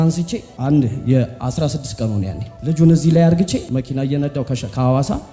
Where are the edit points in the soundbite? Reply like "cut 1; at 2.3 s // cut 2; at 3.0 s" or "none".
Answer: none